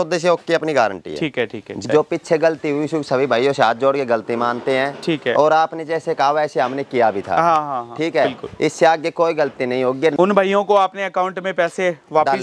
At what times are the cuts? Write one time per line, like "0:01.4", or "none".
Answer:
0:01.8
0:10.1

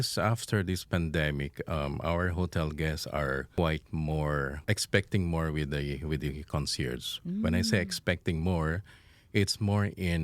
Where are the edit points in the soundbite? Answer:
0:03.5
0:04.6

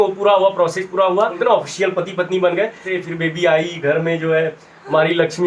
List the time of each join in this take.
0:01.4
0:02.9

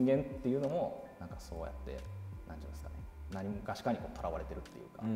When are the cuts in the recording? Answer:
none

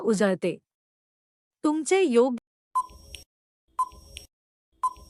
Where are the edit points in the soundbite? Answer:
none

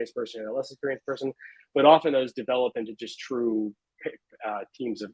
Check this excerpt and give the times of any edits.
none

